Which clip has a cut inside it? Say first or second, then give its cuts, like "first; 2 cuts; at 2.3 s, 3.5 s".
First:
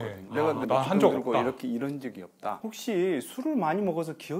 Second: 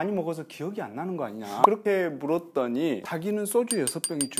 second; 2 cuts; at 1.6 s, 3.1 s